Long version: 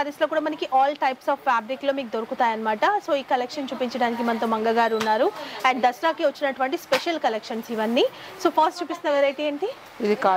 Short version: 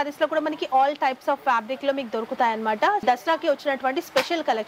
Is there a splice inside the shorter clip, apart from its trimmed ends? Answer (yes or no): yes